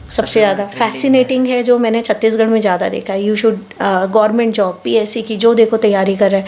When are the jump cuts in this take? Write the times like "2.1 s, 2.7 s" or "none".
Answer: none